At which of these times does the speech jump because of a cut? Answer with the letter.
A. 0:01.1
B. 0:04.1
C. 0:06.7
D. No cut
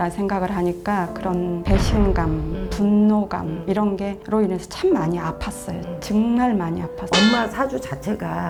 D